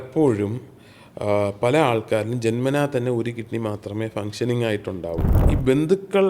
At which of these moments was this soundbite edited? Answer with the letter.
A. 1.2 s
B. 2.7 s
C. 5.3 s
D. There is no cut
C